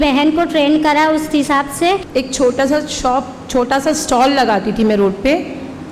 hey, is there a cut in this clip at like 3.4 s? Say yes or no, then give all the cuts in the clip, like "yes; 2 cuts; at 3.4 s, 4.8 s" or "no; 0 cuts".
no; 1 cut; at 2.1 s